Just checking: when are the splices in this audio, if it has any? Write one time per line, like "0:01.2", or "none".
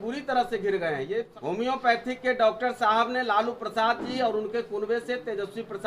0:01.3